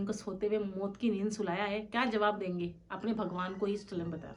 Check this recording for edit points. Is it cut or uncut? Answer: uncut